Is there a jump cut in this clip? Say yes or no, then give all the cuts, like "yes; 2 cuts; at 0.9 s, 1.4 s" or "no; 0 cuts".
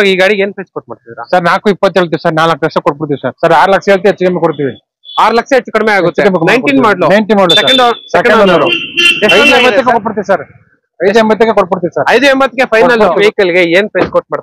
yes; 2 cuts; at 3.3 s, 13.2 s